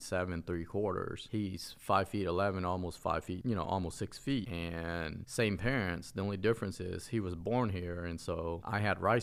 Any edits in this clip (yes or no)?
no